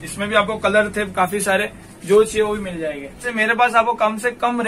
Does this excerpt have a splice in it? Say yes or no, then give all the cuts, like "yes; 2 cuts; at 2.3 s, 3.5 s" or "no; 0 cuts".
yes; 1 cut; at 3.3 s